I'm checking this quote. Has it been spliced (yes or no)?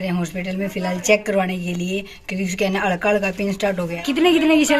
yes